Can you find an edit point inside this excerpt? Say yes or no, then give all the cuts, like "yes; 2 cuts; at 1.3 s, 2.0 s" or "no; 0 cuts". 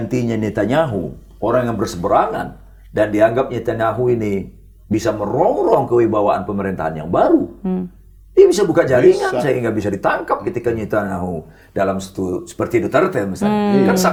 no; 0 cuts